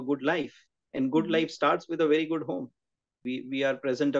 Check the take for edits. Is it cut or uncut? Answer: cut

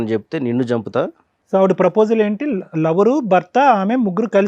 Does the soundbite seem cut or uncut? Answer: uncut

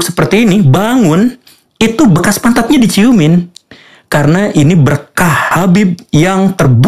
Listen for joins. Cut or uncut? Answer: cut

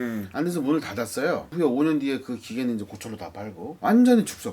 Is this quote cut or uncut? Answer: cut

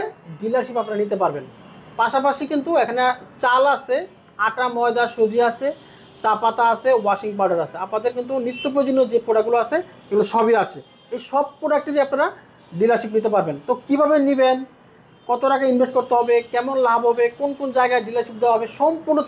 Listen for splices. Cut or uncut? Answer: uncut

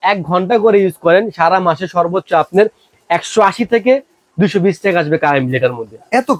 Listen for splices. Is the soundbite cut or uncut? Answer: uncut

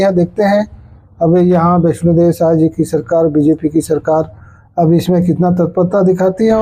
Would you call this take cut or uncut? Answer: uncut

